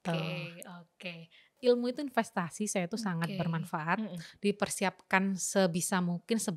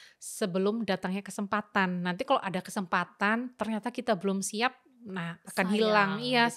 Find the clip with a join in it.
first; 1 cut; at 1.5 s

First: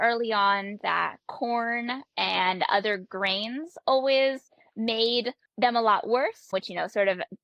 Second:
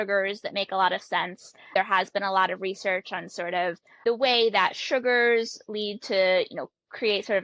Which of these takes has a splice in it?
first; 1 cut; at 5.4 s

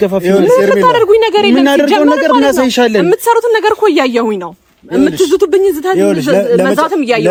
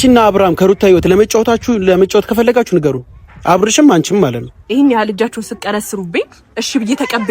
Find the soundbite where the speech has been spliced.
second; 1 cut; at 4.5 s

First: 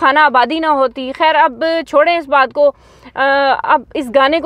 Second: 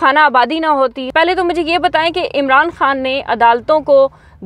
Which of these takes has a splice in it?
second; 1 cut; at 1.0 s

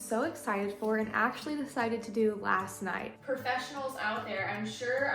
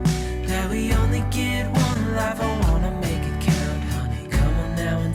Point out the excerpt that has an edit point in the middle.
first; 1 cut; at 3.1 s

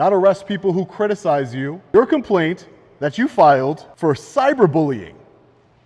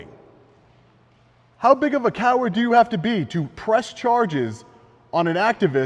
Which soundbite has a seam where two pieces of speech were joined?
first; 2 cuts; at 1.7 s, 3.9 s

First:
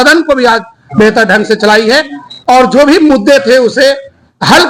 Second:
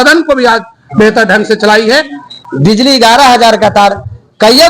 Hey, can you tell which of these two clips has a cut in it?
second; 1 cut; at 2.3 s

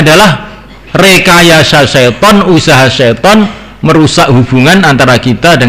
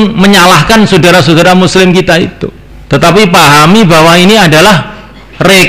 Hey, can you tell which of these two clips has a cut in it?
second; 1 cut; at 3.2 s

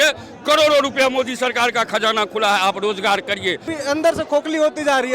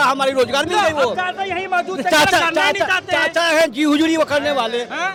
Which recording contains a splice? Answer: first; 1 cut; at 3.7 s

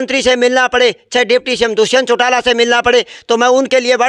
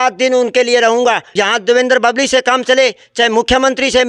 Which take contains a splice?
second; 1 cut; at 1.3 s

